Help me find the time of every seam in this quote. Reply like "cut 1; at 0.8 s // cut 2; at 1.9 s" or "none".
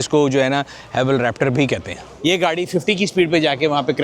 cut 1; at 2.1 s

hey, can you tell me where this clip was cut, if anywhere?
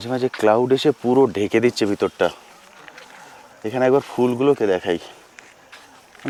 none

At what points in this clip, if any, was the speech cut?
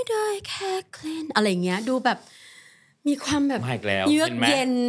none

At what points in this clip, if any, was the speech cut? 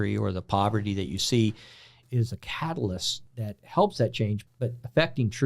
cut 1; at 1.9 s // cut 2; at 3.2 s // cut 3; at 4.4 s

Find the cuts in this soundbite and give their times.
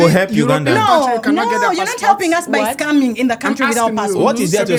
none

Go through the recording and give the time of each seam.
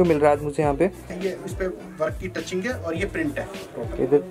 cut 1; at 1.2 s

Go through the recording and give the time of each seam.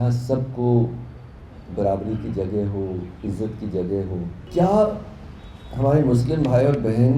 cut 1; at 4.4 s

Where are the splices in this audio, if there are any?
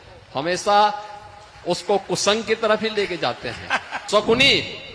cut 1; at 3.9 s

